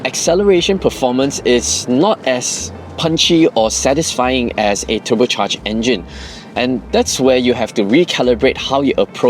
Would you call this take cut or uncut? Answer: uncut